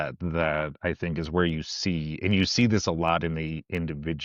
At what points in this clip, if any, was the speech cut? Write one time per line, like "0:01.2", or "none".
none